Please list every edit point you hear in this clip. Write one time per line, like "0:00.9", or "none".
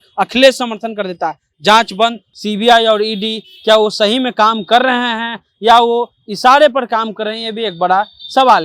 0:02.3